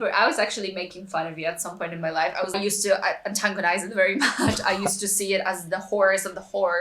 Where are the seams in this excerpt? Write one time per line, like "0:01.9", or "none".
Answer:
0:02.5